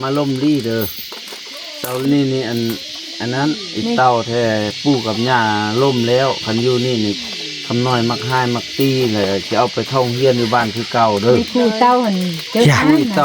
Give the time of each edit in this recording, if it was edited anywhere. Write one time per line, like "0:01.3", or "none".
0:02.0